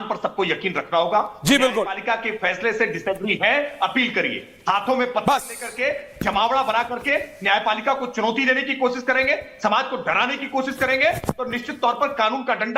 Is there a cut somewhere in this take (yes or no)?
no